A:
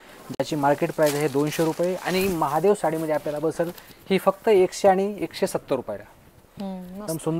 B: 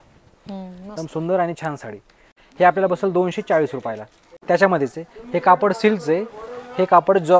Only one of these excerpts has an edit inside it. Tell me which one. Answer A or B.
B